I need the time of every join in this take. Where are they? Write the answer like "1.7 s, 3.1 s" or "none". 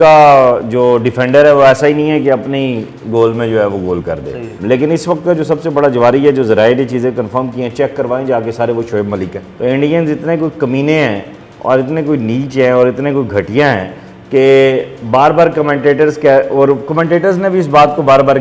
4.5 s, 9.4 s